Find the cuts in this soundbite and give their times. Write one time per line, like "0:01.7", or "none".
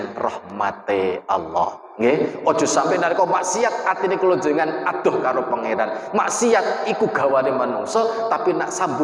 none

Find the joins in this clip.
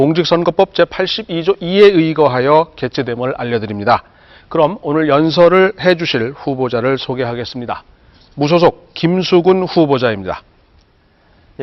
none

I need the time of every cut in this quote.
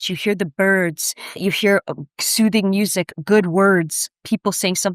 0:01.4

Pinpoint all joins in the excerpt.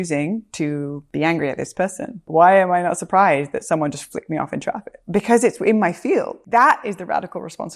0:01.0
0:02.2
0:04.9
0:06.4

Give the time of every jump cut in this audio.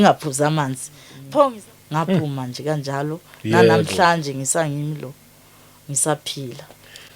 0:01.6

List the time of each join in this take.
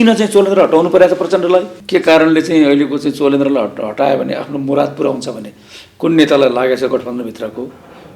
0:01.8

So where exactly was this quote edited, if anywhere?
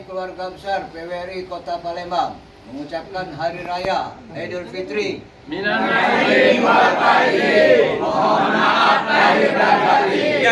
none

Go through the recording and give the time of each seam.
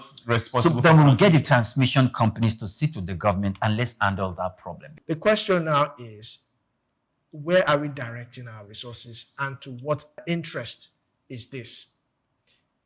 0:05.0
0:10.2

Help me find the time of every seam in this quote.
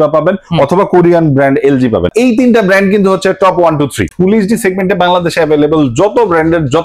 0:02.1
0:04.1

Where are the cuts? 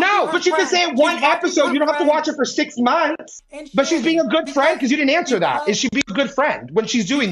0:03.4

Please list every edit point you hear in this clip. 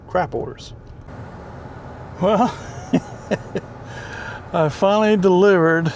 0:01.0

